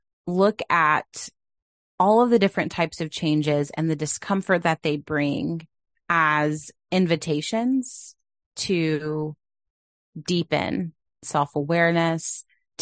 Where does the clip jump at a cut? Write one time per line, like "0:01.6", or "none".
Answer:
0:11.2